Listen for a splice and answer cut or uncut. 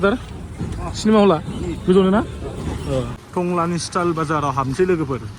cut